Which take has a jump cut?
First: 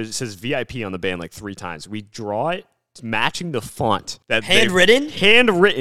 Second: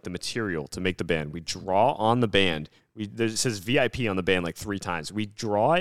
first; 1 cut; at 4.1 s

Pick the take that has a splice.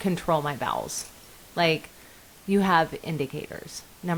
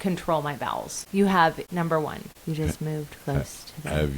second; 2 cuts; at 0.9 s, 1.8 s

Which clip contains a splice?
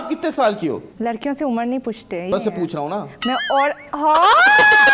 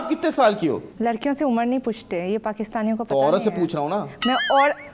first; 1 cut; at 2.3 s

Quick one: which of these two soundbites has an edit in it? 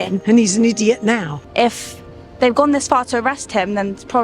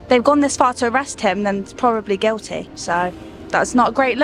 first; 1 cut; at 1.4 s

